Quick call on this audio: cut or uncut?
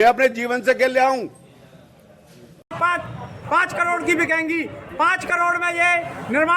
cut